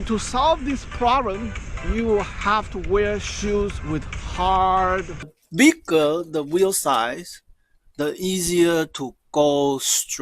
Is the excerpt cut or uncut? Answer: cut